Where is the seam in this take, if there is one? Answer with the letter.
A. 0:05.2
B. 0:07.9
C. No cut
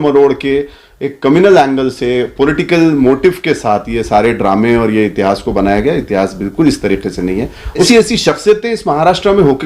B